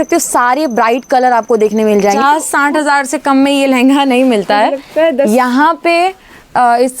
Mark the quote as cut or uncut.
cut